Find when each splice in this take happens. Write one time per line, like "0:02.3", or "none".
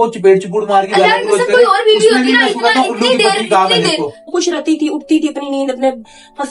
0:04.2